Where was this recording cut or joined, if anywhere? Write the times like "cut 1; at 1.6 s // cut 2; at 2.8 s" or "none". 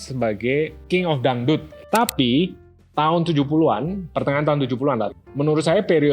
cut 1; at 0.8 s // cut 2; at 1.8 s // cut 3; at 5.1 s